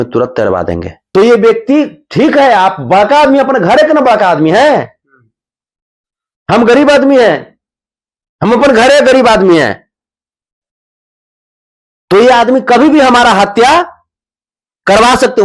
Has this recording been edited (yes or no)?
yes